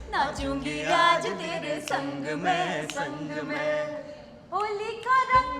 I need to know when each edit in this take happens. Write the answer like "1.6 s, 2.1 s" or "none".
none